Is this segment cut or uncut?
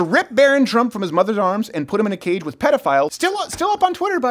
cut